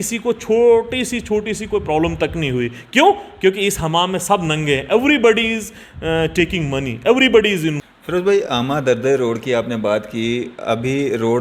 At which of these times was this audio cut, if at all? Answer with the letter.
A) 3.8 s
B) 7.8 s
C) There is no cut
B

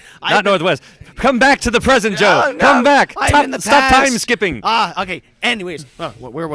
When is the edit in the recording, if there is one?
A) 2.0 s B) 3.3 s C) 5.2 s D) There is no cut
B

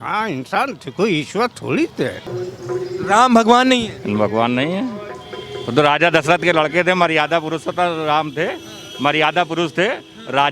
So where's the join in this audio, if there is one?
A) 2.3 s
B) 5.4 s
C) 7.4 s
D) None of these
A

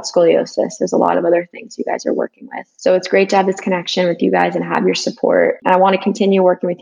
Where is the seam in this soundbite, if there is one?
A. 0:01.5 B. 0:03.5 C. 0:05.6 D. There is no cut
C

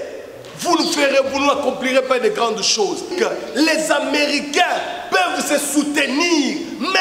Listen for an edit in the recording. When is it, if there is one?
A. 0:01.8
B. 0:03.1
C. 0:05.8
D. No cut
B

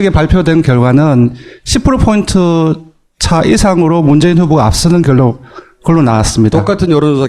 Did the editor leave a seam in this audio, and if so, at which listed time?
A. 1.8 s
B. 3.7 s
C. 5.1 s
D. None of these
B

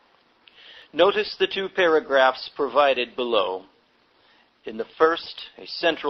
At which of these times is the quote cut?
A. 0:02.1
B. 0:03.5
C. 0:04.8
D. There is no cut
A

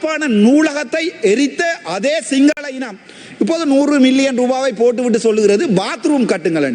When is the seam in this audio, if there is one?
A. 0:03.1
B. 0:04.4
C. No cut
C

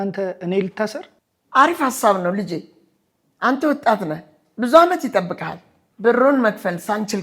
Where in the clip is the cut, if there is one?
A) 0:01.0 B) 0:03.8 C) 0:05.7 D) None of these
D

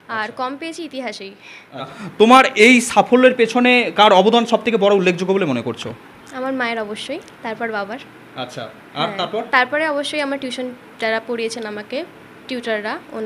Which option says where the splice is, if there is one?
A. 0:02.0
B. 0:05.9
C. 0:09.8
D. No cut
A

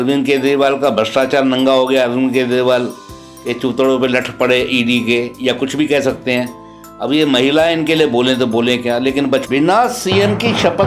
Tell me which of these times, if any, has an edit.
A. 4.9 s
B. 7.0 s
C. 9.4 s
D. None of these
C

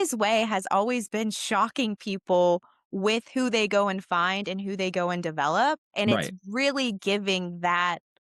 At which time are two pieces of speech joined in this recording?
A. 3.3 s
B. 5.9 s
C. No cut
B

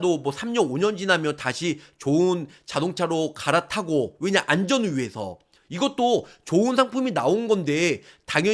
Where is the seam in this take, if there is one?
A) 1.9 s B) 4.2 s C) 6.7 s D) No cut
D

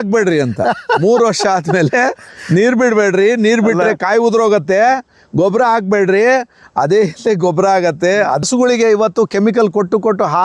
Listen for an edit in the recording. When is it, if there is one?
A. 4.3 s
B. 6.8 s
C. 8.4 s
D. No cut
C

